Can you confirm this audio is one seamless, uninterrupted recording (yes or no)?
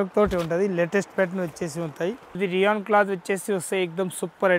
no